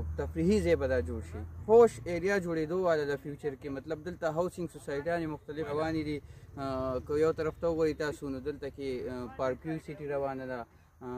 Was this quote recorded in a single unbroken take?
no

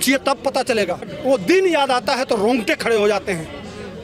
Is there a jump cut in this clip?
yes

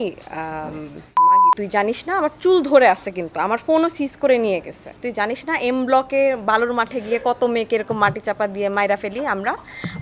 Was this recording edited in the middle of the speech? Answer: yes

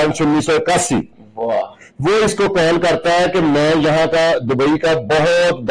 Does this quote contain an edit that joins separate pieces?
no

